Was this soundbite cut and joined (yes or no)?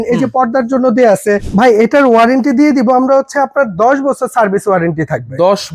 yes